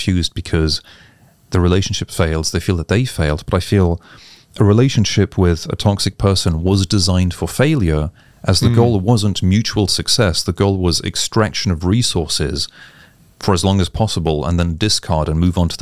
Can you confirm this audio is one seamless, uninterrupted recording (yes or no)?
yes